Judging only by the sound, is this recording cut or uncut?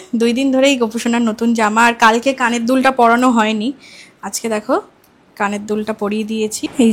uncut